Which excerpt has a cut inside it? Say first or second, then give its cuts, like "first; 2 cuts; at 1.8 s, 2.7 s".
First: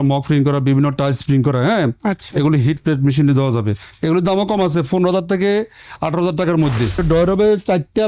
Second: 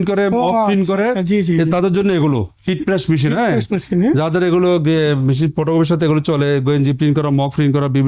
first; 1 cut; at 7.0 s